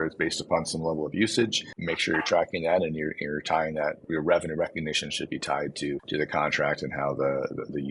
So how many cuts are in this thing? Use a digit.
3